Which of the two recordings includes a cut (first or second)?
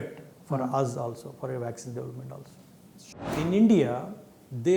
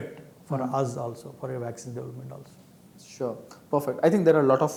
first